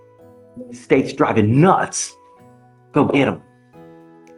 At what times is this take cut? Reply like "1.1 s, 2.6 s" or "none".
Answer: 3.4 s